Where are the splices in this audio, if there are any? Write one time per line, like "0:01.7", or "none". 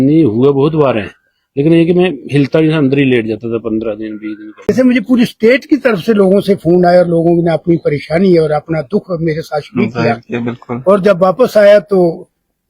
0:04.7